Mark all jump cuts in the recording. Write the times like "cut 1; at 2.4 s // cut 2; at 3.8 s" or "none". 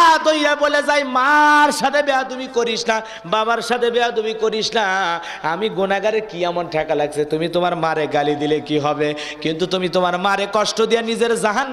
none